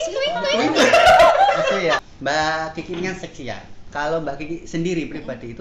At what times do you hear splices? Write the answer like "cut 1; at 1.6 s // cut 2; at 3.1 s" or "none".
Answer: cut 1; at 2.1 s